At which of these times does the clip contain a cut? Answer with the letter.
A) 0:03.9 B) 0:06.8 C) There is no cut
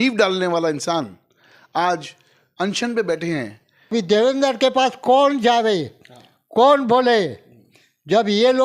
A